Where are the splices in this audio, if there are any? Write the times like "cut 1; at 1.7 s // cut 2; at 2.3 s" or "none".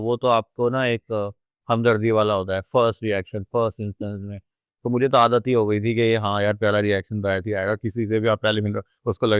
none

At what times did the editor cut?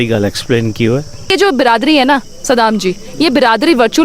cut 1; at 1.3 s

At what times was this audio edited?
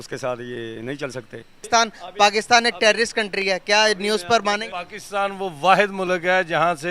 cut 1; at 1.5 s // cut 2; at 4.7 s

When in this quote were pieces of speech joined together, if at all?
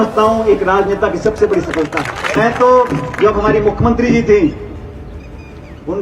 cut 1; at 2.3 s

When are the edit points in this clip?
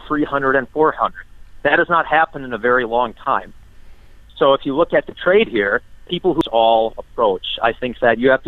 cut 1; at 6.5 s

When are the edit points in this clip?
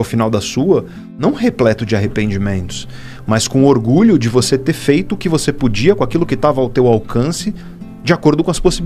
none

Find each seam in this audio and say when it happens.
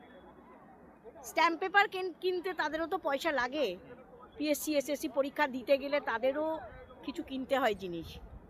none

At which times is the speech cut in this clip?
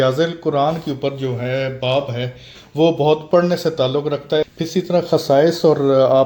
cut 1; at 4.5 s

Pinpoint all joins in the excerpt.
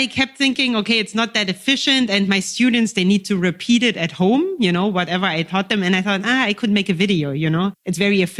none

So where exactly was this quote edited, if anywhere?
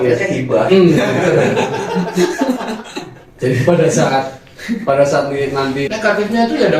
cut 1; at 5.9 s

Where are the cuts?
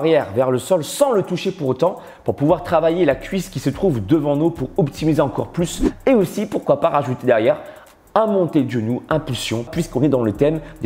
cut 1; at 5.8 s // cut 2; at 9.8 s

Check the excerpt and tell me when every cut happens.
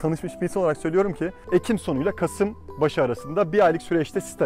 cut 1; at 1.3 s

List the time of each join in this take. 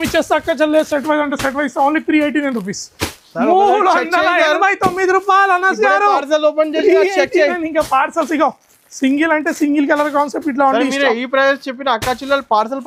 none

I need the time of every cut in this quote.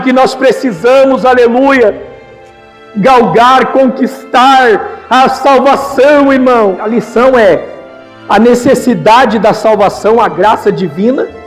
none

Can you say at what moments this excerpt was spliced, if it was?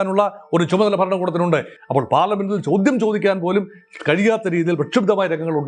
none

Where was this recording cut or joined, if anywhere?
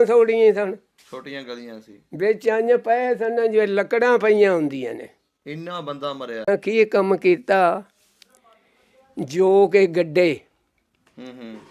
cut 1; at 6.5 s

